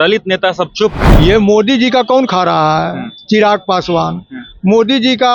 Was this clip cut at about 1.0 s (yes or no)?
yes